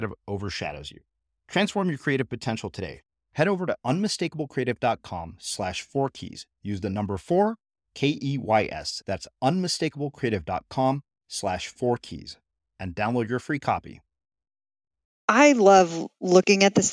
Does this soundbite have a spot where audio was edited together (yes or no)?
yes